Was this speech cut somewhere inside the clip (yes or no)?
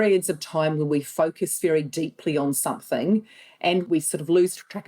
yes